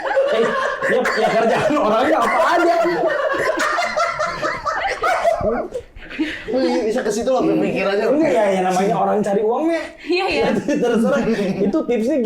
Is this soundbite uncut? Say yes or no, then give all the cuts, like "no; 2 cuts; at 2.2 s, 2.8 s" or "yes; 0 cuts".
yes; 0 cuts